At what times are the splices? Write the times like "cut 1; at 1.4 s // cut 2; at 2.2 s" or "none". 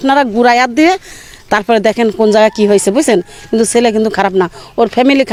none

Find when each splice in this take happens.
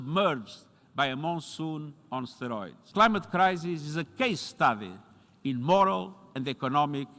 cut 1; at 2.8 s

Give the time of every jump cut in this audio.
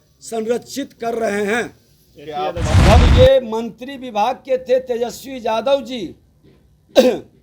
cut 1; at 2.6 s

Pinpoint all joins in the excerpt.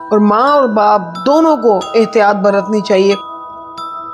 cut 1; at 3.2 s

